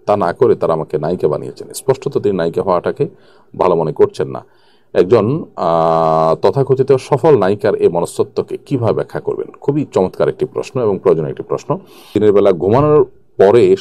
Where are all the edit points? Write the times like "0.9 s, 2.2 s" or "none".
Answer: 11.9 s